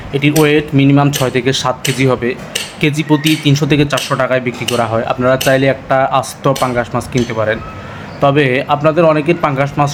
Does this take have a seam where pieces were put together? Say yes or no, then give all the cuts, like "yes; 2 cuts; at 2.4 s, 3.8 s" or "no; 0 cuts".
no; 0 cuts